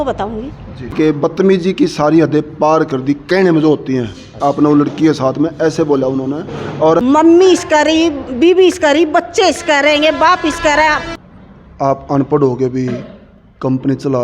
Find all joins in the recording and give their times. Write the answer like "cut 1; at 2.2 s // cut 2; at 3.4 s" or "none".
cut 1; at 0.9 s // cut 2; at 7.0 s // cut 3; at 11.0 s